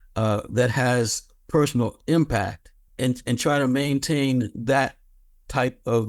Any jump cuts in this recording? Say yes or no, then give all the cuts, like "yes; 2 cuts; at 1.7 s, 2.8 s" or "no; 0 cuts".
yes; 1 cut; at 2.8 s